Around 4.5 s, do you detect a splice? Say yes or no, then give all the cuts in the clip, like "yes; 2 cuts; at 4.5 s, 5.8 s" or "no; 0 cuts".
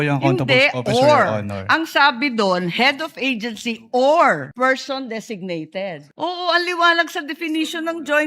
yes; 2 cuts; at 4.5 s, 6.1 s